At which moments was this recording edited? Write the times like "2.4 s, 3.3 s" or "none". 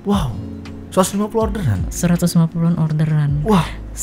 none